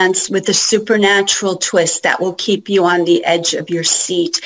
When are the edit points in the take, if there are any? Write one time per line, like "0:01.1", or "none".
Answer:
none